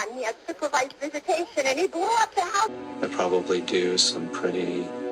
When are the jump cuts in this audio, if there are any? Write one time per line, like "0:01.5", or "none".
0:02.7